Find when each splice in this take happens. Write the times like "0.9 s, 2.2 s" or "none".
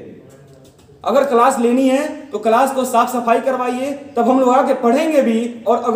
none